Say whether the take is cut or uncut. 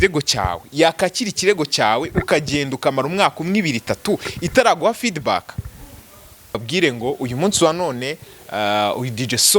cut